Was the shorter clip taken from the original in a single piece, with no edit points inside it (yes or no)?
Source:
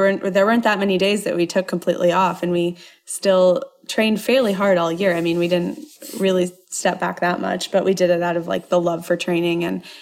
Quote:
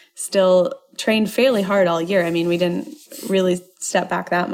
yes